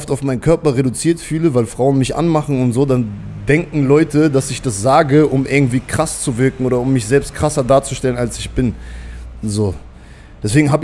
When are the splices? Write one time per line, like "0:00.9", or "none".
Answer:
none